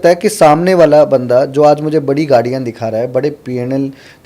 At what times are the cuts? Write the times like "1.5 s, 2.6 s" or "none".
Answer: none